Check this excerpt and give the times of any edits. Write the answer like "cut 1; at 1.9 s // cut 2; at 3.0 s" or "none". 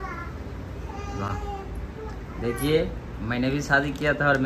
none